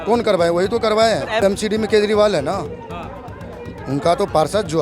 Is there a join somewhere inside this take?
yes; 1 cut; at 1.4 s

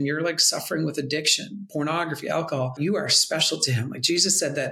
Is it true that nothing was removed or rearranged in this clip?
no; 1 cut; at 2.7 s

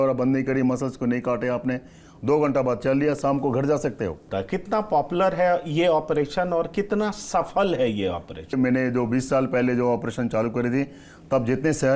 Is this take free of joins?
no; 2 cuts; at 4.2 s, 8.5 s

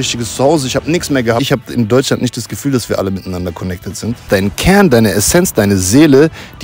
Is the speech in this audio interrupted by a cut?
yes; 2 cuts; at 1.4 s, 4.2 s

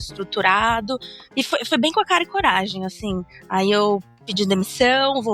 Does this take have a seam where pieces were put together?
yes; 1 cut; at 1.2 s

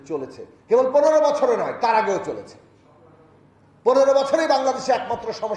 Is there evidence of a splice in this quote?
no; 0 cuts

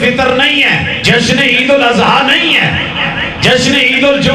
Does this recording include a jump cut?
yes; 1 cut; at 0.9 s

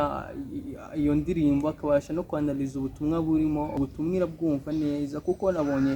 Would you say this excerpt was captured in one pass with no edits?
no; 1 cut; at 3.8 s

